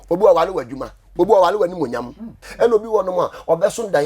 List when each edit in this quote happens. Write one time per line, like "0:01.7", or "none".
0:02.4